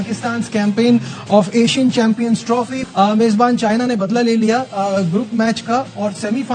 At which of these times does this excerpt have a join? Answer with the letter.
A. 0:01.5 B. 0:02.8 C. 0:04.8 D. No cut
B